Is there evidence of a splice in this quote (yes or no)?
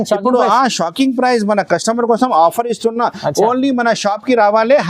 no